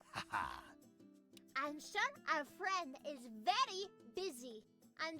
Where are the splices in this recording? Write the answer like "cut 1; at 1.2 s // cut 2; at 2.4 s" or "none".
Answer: cut 1; at 1.1 s